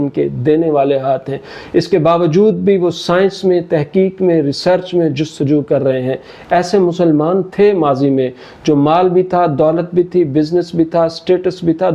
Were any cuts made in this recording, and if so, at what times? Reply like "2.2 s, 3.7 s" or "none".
none